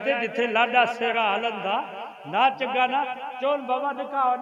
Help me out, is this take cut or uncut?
uncut